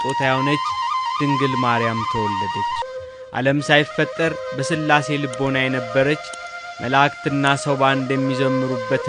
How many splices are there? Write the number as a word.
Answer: one